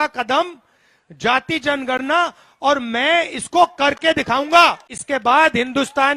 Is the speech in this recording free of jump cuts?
no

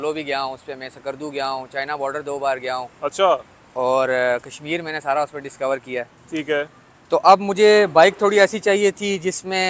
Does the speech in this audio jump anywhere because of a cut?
no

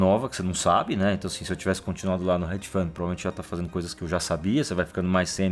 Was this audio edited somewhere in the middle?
no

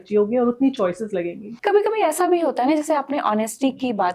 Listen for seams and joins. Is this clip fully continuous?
no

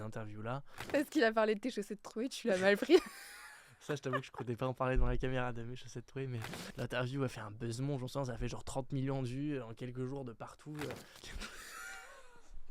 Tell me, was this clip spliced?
yes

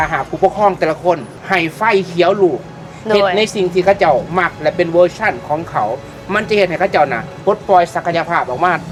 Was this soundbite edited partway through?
no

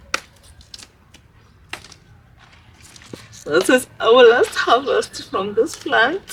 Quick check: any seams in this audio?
no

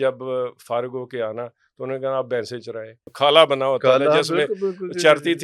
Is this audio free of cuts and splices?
no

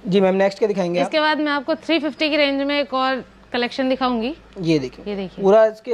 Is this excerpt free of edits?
yes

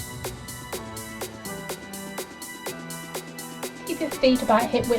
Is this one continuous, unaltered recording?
no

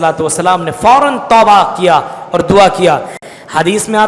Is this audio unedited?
no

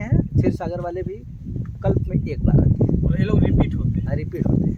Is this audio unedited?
yes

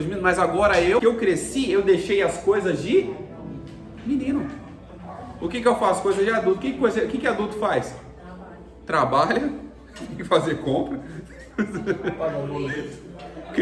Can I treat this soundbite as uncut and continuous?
no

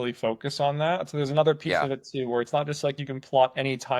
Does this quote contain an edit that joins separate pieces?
no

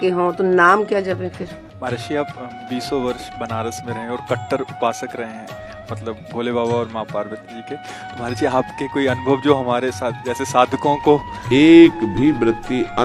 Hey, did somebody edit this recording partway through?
yes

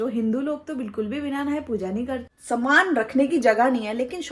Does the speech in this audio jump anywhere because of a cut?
yes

